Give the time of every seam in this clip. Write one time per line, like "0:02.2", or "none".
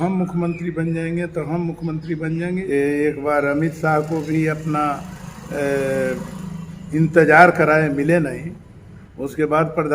0:02.6